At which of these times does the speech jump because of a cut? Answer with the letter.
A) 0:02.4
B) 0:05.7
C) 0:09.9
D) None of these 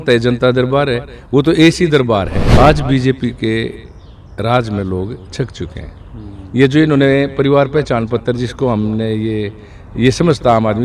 A